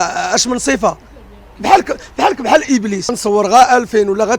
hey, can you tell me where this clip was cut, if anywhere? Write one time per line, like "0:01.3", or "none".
0:03.1

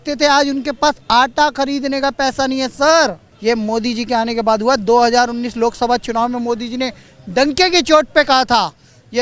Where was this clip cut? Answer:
none

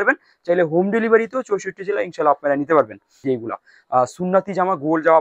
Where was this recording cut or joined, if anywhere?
0:03.2

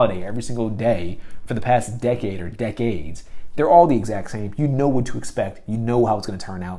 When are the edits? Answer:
none

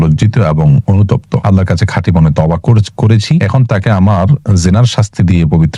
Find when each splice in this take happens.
0:01.3
0:03.4

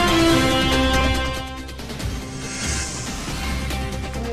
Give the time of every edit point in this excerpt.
0:01.0
0:02.4

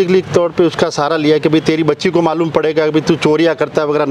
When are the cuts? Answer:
none

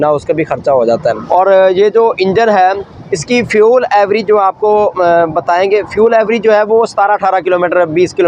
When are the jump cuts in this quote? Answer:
0:01.2

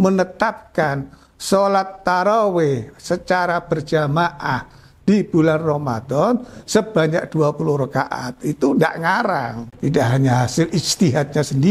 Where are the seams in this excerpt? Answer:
0:09.6

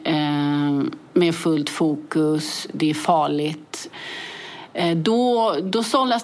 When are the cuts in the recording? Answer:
0:03.9

